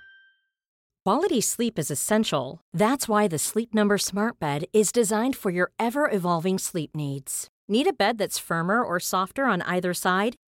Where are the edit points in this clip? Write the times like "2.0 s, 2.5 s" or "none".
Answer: 0.9 s

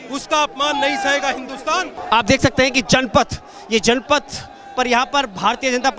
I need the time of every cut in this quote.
2.0 s

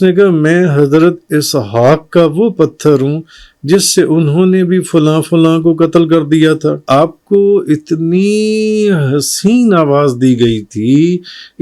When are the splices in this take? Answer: 6.8 s

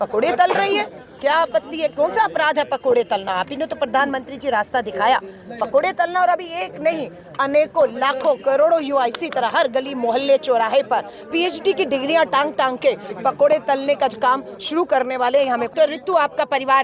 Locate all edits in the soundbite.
15.7 s

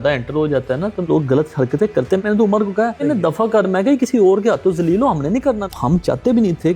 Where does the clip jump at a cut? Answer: 1.1 s, 2.2 s, 3.0 s, 5.6 s

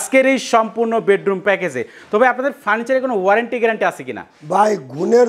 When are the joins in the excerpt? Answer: none

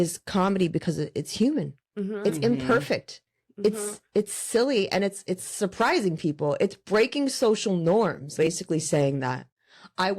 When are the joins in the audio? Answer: 8.3 s

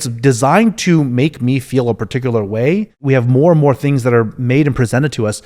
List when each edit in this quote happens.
3.0 s

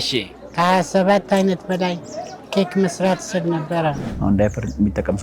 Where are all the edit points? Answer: 4.1 s

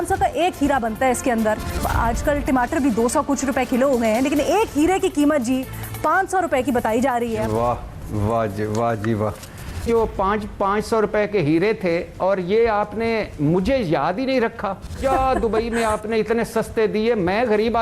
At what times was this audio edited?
1.8 s, 7.4 s, 9.8 s, 15.0 s

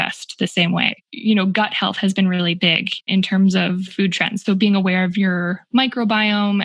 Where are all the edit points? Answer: 1.1 s, 3.1 s, 3.9 s

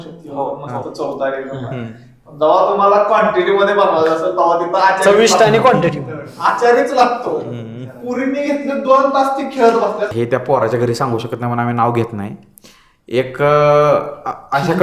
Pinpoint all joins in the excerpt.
10.1 s

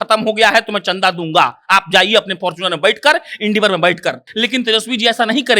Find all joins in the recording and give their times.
4.3 s

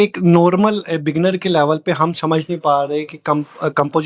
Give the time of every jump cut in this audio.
none

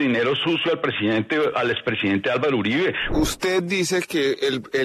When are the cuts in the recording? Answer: 3.0 s

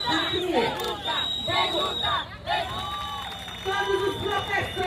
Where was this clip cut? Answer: none

